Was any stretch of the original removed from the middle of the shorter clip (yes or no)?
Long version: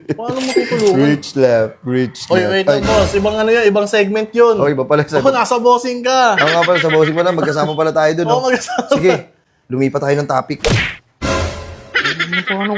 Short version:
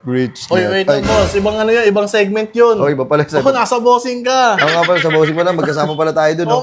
no